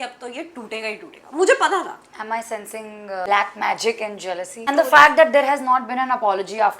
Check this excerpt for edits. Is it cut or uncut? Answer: cut